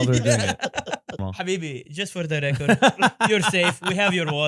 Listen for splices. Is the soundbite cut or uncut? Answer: cut